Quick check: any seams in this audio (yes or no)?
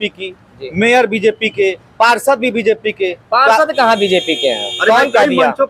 no